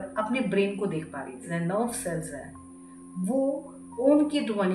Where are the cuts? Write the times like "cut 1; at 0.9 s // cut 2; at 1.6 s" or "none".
cut 1; at 1.5 s // cut 2; at 4.0 s